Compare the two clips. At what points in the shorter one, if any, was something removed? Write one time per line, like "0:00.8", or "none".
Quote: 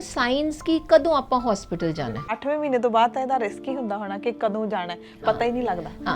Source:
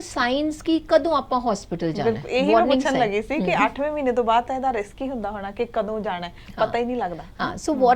0:02.3